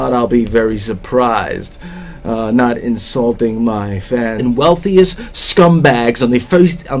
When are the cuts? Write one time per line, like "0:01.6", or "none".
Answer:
none

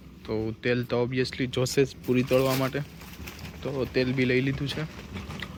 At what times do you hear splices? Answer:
none

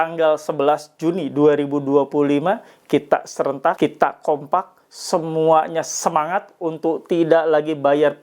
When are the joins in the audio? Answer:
0:03.8

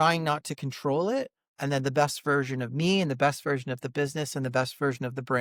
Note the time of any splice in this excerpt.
none

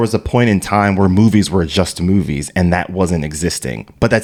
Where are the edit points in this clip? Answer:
none

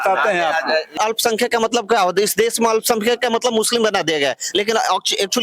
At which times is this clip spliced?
0:01.0

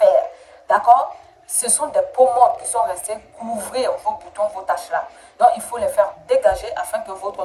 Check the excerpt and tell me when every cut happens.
none

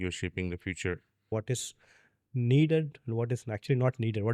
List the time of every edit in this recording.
0:01.3

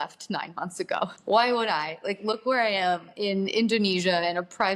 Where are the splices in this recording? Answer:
0:01.2
0:03.1

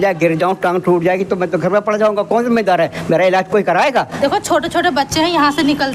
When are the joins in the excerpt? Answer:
0:04.1

